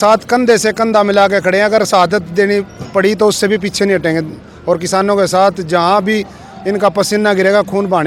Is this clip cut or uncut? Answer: uncut